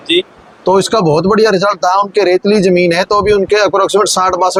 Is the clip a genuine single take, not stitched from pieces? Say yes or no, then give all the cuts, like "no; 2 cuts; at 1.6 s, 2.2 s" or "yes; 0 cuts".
yes; 0 cuts